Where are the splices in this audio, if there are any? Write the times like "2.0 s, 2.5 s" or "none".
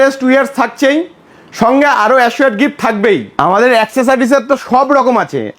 3.3 s